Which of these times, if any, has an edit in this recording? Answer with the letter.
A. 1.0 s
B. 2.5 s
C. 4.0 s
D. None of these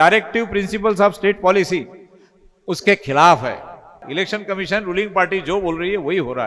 C